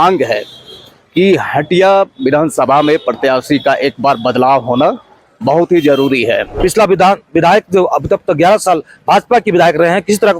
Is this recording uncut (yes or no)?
no